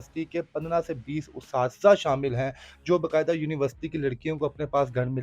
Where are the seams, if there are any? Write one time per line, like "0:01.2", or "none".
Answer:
none

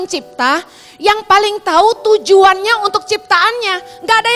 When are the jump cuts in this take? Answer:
none

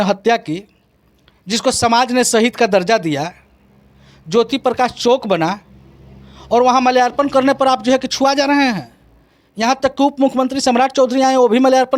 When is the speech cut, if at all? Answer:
none

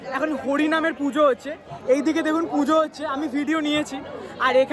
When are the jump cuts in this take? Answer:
none

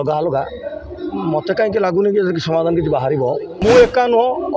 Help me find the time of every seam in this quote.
0:03.5

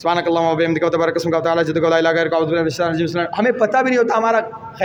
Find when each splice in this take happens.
none

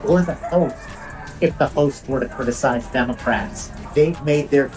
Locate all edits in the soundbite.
0:03.7

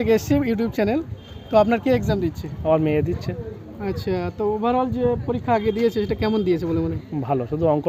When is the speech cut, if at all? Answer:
none

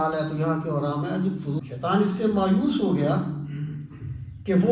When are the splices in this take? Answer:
0:01.6

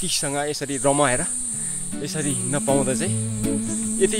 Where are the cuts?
none

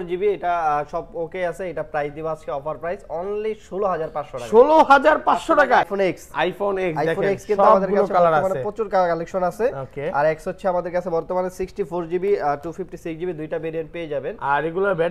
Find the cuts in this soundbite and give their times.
0:05.9

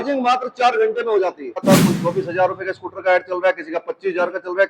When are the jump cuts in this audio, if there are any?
0:01.6

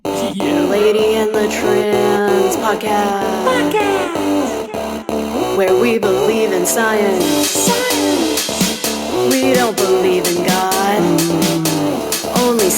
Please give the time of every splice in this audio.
none

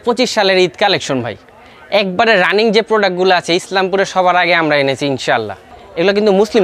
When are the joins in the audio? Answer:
0:05.7

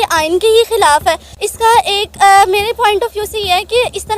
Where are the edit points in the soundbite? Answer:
0:01.2

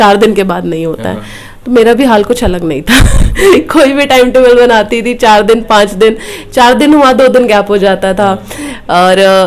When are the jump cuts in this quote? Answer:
none

